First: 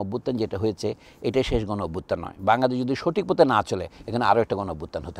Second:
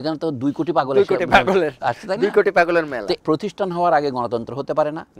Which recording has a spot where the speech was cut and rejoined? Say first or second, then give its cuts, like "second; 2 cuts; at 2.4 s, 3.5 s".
second; 1 cut; at 3.2 s